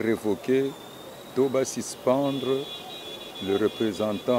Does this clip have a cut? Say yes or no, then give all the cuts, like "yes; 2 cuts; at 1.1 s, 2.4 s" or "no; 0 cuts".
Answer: no; 0 cuts